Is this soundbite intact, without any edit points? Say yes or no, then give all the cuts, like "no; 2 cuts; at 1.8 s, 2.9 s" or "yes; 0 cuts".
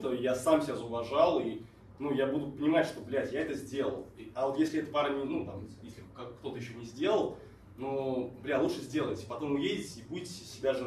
yes; 0 cuts